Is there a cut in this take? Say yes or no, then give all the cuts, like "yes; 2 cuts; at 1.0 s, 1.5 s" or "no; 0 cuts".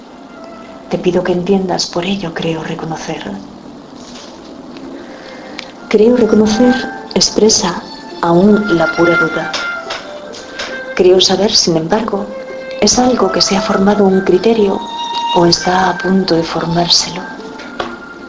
yes; 1 cut; at 2.7 s